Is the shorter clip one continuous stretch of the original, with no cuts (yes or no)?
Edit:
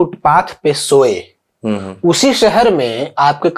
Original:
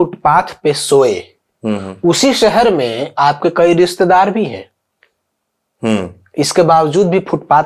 yes